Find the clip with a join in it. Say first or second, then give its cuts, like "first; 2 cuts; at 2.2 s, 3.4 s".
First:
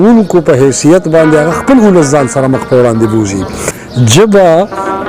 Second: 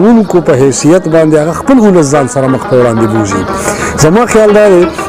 first; 1 cut; at 3.8 s